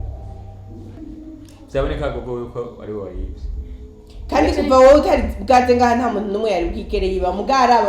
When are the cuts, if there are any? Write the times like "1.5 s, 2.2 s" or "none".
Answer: 1.0 s